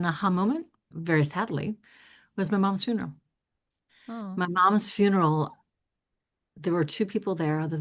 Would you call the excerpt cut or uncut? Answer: uncut